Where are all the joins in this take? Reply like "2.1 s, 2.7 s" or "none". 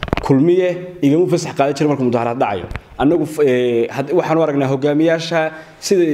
none

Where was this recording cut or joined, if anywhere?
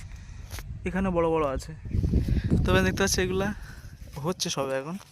2.0 s

